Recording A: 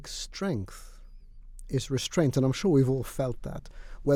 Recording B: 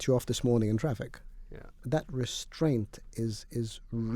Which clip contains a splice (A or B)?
B